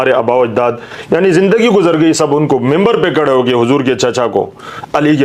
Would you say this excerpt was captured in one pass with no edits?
yes; 0 cuts

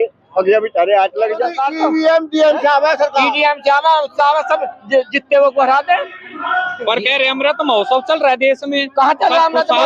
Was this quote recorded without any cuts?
no; 1 cut; at 1.6 s

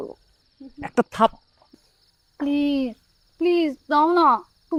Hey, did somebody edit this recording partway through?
no; 0 cuts

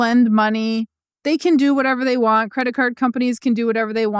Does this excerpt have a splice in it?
no; 0 cuts

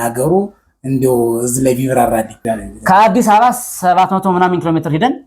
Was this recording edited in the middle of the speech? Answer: yes; 1 cut; at 2.4 s

